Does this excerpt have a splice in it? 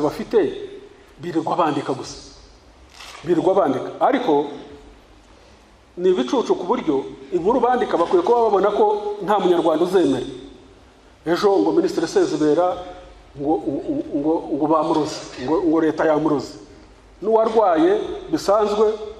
no; 0 cuts

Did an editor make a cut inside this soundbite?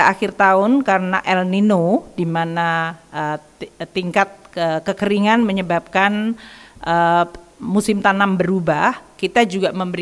no; 0 cuts

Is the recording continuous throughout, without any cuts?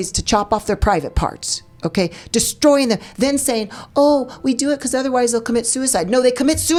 yes; 0 cuts

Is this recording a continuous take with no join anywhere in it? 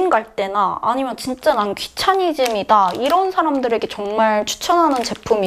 yes; 0 cuts

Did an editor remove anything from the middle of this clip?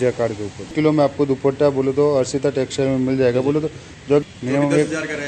yes; 2 cuts; at 0.7 s, 4.2 s

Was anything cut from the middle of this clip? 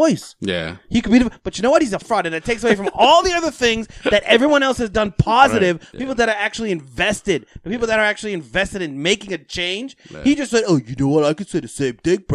yes; 2 cuts; at 2.0 s, 5.9 s

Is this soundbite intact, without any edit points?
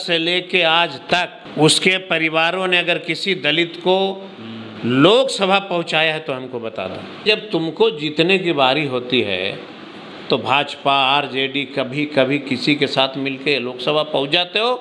no; 2 cuts; at 1.4 s, 7.2 s

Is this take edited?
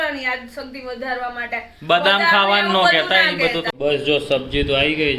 yes; 1 cut; at 3.7 s

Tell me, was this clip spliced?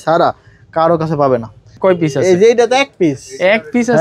yes; 1 cut; at 1.7 s

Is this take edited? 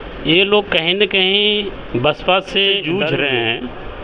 yes; 1 cut; at 2.8 s

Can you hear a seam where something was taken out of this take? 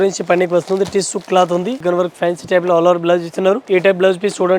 yes; 2 cuts; at 1.8 s, 3.6 s

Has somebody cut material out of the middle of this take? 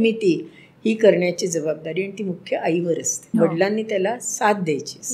yes; 1 cut; at 3.1 s

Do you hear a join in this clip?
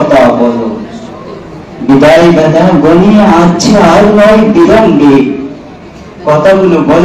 no; 0 cuts

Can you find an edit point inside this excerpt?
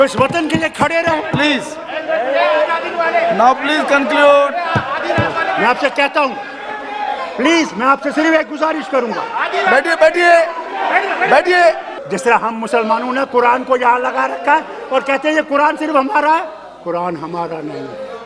yes; 1 cut; at 11.9 s

